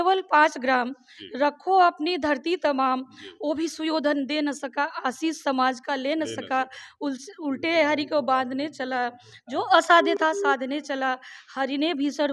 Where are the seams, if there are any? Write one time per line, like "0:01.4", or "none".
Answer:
none